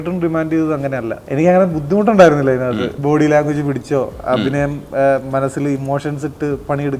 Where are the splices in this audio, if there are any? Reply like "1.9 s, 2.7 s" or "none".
1.2 s, 2.9 s